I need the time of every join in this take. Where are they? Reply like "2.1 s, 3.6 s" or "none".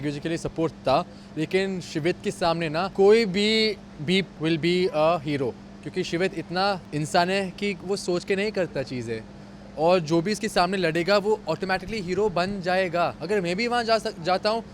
2.9 s, 4.3 s, 6.9 s, 13.2 s